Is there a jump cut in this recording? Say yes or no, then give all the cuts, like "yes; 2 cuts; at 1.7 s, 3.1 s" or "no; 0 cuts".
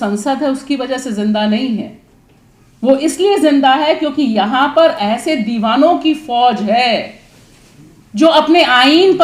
no; 0 cuts